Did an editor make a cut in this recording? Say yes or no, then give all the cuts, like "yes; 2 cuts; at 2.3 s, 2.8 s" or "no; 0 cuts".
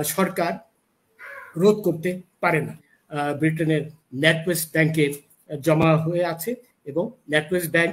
yes; 1 cut; at 2.9 s